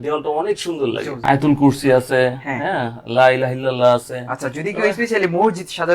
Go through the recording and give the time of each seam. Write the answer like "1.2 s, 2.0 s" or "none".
1.1 s